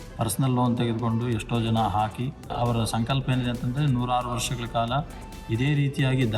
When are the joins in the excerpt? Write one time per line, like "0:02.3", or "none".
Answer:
0:02.4

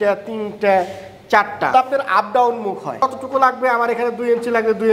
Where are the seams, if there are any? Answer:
0:01.7
0:03.0

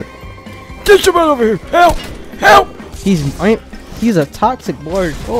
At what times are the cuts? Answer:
0:02.9

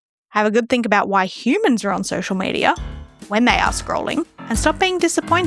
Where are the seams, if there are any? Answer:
none

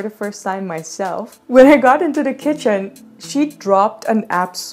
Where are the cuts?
0:01.4

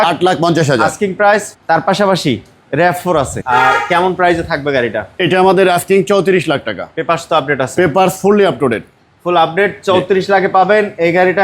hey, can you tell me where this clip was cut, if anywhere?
0:03.4

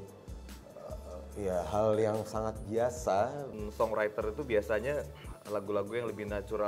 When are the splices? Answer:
0:03.6

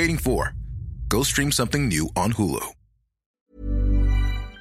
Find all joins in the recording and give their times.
0:03.5

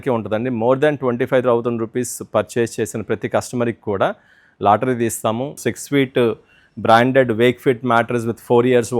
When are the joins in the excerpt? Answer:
0:05.6

